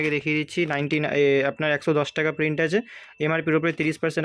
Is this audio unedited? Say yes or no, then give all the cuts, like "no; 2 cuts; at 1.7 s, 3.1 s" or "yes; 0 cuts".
yes; 0 cuts